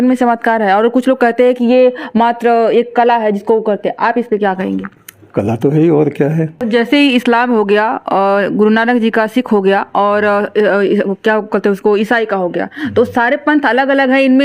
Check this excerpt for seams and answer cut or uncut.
cut